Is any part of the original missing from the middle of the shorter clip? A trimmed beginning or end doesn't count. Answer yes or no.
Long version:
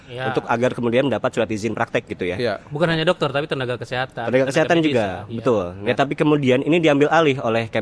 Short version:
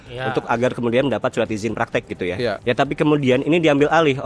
yes